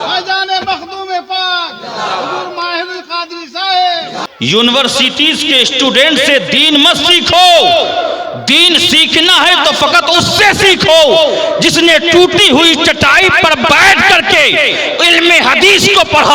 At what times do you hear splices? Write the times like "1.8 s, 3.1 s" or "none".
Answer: 4.2 s